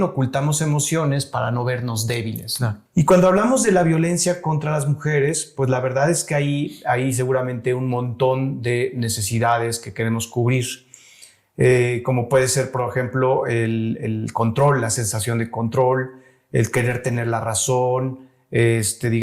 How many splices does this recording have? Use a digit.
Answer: 1